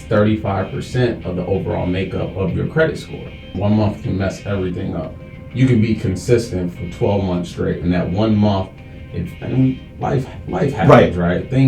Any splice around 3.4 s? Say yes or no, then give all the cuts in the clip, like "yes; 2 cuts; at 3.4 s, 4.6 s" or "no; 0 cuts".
yes; 1 cut; at 3.4 s